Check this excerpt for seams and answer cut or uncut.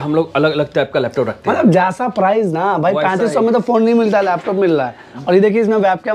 uncut